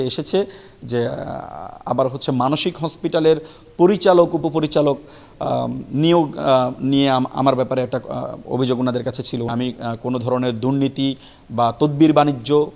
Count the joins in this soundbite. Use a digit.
1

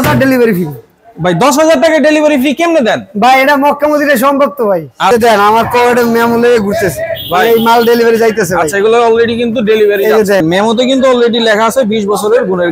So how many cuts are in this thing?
2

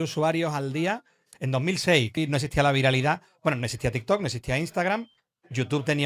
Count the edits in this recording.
1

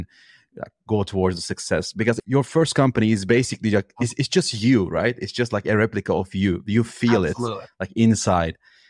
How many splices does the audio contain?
1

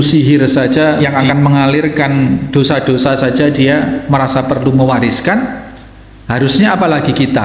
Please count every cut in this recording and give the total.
1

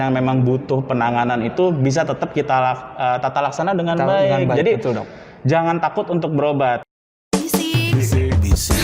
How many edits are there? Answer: 1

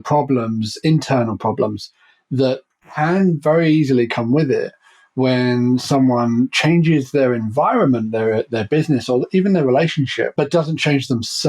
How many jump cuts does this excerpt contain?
1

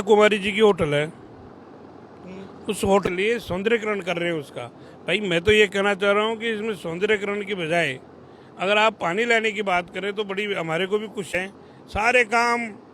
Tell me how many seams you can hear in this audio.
2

